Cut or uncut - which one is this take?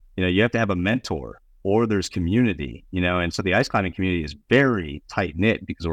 uncut